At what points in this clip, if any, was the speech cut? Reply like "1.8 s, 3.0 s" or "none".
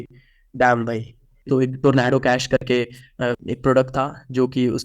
1.4 s, 3.3 s

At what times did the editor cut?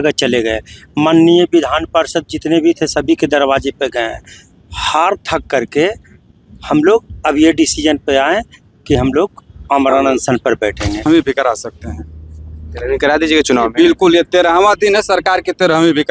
11.0 s

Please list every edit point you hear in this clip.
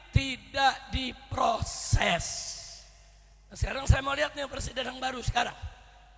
none

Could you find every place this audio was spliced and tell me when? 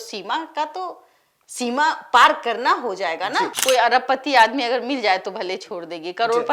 3.5 s

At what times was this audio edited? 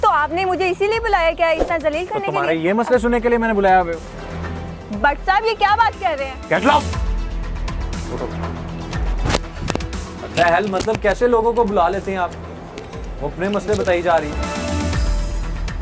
none

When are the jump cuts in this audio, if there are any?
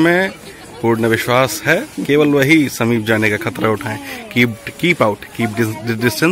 none

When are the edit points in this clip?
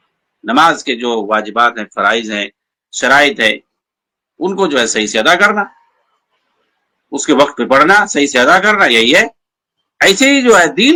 none

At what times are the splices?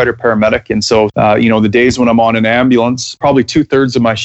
1.1 s, 3.2 s

